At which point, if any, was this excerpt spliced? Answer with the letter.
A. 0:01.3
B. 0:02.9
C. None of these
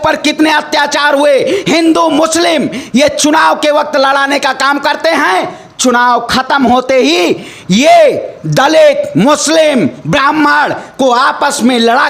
C